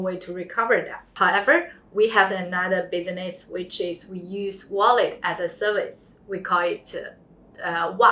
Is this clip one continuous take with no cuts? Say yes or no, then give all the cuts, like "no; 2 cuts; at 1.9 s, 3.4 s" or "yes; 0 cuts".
no; 1 cut; at 1.1 s